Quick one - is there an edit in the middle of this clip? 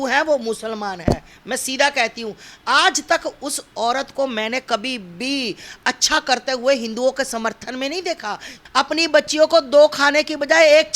yes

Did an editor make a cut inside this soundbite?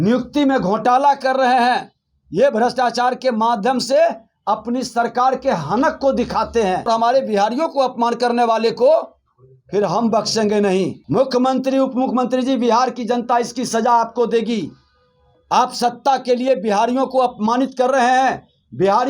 yes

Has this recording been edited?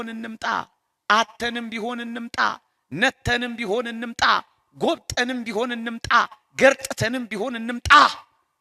no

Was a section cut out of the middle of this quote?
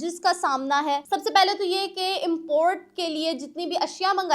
yes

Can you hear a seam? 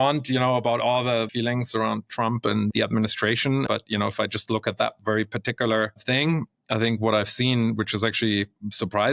yes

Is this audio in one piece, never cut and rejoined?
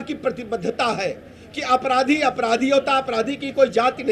yes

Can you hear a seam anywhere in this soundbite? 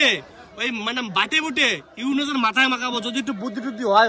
no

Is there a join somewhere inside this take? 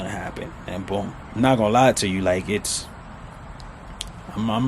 yes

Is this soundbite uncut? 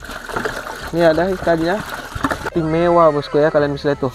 no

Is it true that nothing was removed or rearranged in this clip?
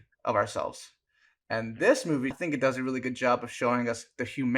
no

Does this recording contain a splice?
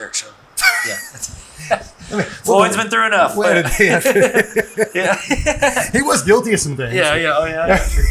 no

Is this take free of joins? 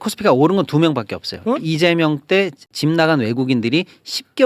no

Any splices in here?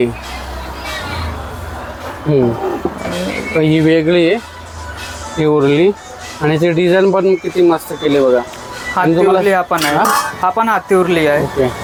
no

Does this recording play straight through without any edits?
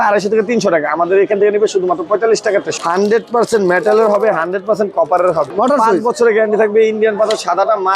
no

